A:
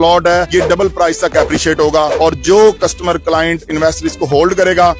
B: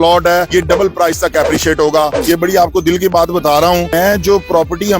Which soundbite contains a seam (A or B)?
B